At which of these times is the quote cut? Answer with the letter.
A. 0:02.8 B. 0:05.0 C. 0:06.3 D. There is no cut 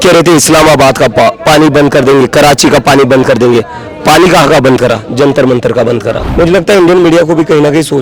C